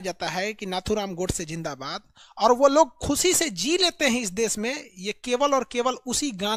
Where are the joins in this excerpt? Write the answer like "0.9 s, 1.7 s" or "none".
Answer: none